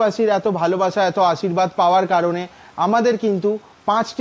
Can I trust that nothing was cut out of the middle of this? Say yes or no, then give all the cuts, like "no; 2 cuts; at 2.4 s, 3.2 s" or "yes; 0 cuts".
yes; 0 cuts